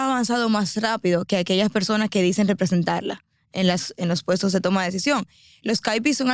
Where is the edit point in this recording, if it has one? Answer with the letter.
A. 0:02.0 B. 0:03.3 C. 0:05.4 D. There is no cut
D